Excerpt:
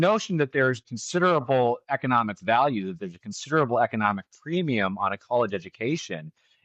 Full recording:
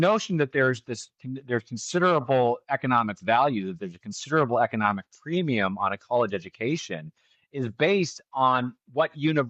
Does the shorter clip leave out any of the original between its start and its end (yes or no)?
yes